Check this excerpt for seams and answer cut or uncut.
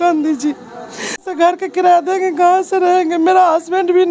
cut